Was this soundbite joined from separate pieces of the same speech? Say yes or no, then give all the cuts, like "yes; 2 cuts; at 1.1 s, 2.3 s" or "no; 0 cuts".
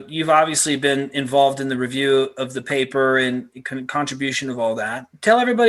no; 0 cuts